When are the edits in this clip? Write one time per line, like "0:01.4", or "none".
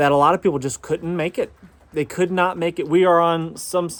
none